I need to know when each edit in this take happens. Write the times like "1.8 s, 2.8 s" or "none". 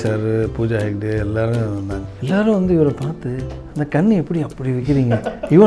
2.1 s